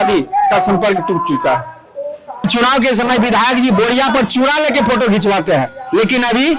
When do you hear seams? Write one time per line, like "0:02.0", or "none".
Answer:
0:02.4